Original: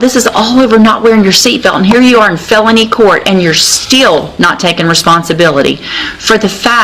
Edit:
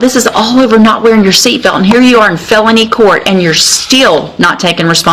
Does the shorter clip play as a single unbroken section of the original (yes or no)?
yes